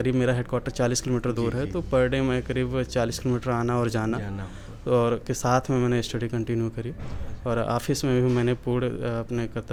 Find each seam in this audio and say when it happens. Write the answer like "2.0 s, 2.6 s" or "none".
none